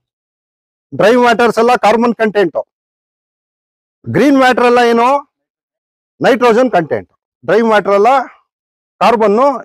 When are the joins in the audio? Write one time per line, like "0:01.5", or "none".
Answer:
none